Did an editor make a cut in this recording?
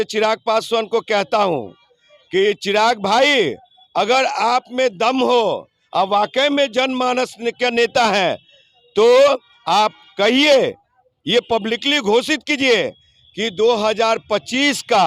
no; 0 cuts

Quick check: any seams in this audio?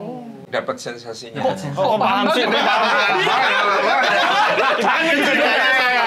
no; 0 cuts

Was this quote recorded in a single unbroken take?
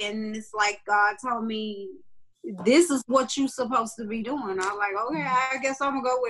yes; 0 cuts

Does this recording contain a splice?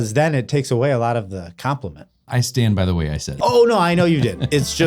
yes; 2 cuts; at 2.2 s, 3.4 s

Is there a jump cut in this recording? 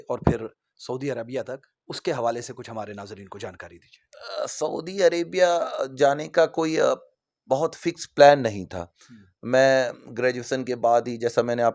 no; 0 cuts

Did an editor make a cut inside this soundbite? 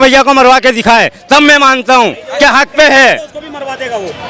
no; 0 cuts

